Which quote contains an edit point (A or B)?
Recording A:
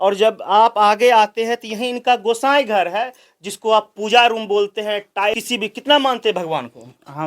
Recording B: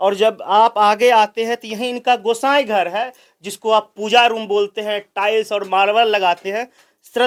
A